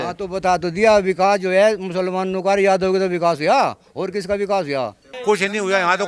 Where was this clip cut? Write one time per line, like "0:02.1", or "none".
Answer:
0:05.1